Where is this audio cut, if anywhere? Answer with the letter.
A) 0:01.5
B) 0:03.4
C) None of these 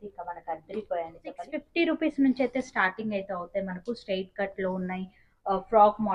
A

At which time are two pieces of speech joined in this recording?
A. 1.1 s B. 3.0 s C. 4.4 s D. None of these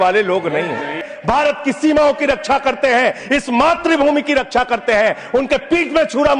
A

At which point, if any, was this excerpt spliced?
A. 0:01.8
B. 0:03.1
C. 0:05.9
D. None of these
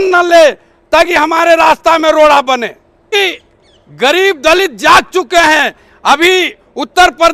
B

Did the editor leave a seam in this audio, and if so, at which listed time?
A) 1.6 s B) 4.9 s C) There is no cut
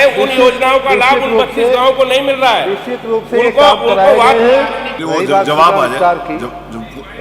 B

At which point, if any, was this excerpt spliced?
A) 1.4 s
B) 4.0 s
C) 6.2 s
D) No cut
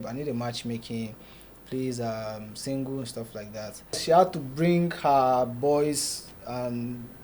B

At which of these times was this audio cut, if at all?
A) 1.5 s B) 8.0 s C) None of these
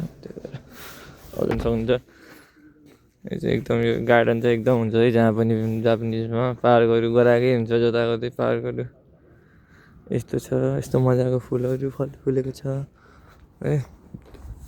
A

